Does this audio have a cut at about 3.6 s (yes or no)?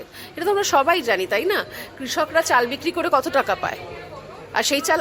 no